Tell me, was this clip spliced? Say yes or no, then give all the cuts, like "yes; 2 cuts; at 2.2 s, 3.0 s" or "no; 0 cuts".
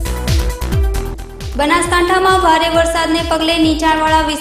yes; 1 cut; at 1.0 s